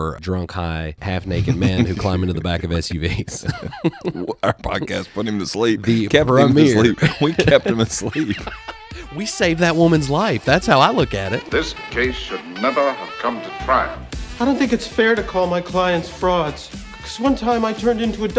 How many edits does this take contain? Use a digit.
1